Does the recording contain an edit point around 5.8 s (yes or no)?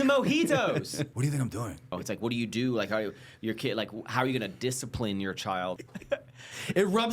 yes